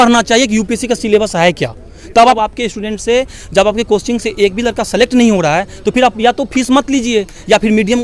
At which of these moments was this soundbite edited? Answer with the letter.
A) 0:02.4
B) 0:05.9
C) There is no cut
A